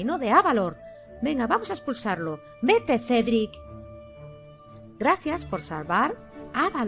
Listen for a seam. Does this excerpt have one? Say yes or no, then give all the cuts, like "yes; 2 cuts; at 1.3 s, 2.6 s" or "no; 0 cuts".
no; 0 cuts